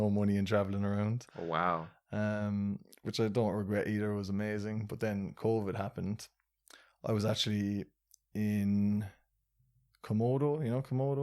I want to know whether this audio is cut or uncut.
uncut